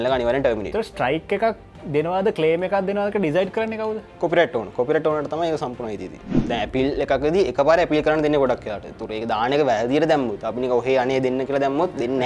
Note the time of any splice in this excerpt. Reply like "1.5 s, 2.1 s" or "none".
6.3 s